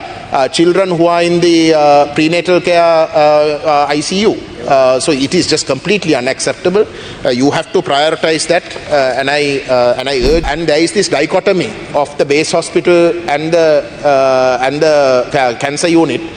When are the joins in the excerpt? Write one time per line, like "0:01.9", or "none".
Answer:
0:10.5